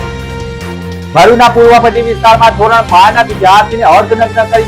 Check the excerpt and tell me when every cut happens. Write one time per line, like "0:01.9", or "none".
0:01.0